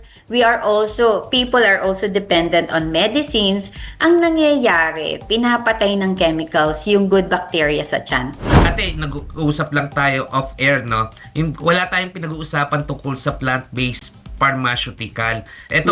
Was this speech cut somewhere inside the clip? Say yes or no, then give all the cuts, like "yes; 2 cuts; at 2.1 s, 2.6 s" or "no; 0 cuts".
yes; 1 cut; at 8.5 s